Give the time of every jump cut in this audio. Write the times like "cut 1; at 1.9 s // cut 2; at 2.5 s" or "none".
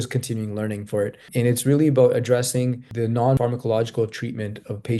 cut 1; at 1.3 s // cut 2; at 3.2 s